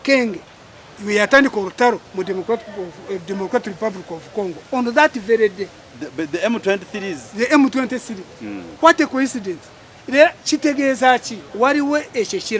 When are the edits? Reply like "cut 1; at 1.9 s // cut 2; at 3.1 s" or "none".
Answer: cut 1; at 11.4 s